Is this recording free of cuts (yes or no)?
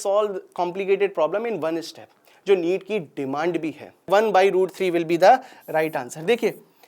no